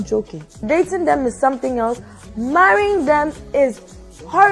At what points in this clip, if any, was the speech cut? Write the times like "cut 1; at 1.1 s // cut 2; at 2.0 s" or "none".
none